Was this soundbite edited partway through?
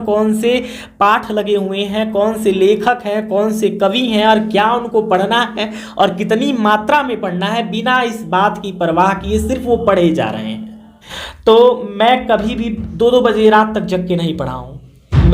yes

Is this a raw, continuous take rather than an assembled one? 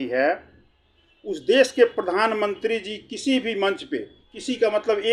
yes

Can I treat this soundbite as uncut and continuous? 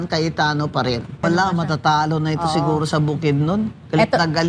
no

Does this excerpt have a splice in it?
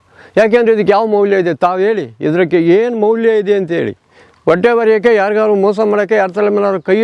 no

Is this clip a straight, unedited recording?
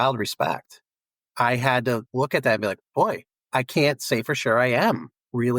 no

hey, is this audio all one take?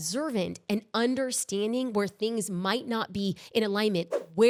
yes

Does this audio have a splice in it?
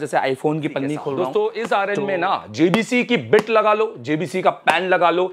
yes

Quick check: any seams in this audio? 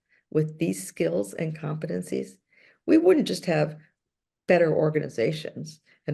no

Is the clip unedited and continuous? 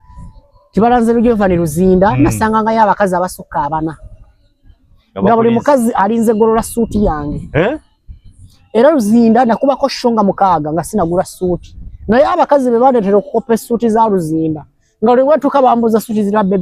yes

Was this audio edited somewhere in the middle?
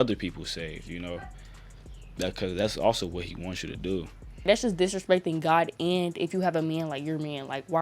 yes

